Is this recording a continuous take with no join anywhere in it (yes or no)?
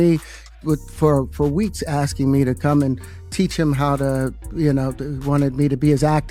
yes